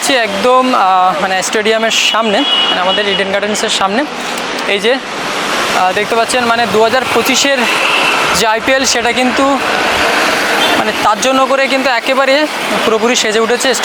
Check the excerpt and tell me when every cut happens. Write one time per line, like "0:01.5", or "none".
none